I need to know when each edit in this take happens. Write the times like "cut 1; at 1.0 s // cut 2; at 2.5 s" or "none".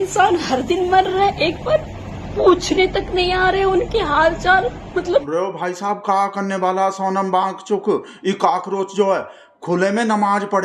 cut 1; at 5.3 s

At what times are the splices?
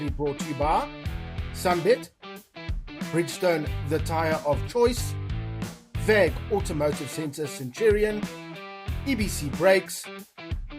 cut 1; at 9.9 s

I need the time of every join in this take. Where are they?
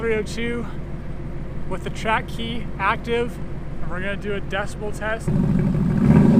cut 1; at 3.7 s // cut 2; at 5.3 s

